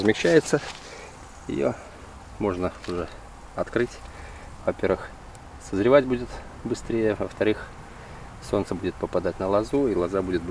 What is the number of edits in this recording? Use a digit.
0